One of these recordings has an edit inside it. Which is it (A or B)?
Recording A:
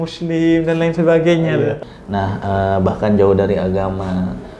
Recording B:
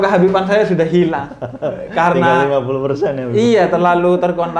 A